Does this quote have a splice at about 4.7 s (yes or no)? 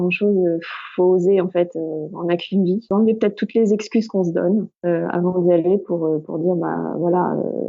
yes